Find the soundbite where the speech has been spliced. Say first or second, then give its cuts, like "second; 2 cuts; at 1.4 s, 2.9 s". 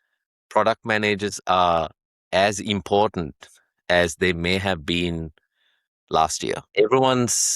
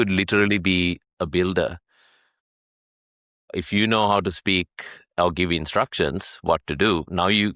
first; 1 cut; at 6.6 s